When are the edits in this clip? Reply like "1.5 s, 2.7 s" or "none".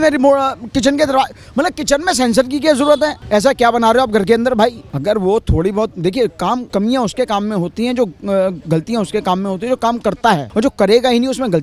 3.2 s, 4.9 s, 6.6 s, 10.5 s